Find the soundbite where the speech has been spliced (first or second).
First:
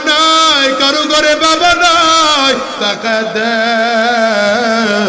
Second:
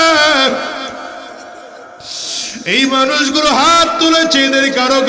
first